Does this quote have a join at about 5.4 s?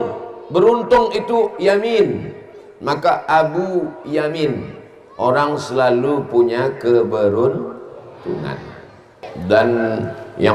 no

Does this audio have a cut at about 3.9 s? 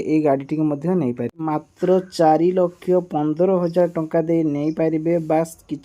no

